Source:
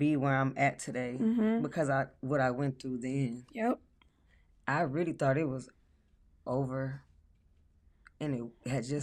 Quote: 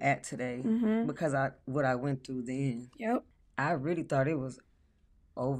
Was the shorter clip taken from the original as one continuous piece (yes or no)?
no